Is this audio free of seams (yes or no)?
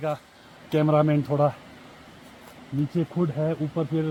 yes